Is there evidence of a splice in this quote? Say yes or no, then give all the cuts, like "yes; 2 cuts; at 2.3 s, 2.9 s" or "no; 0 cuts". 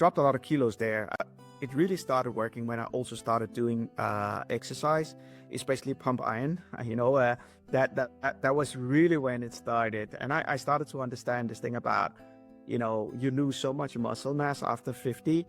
yes; 1 cut; at 1.2 s